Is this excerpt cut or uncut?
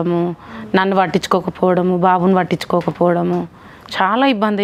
uncut